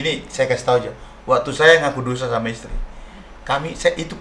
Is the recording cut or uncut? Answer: uncut